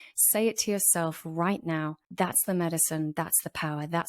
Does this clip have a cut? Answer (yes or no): yes